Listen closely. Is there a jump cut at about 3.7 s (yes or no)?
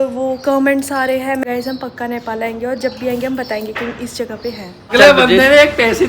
no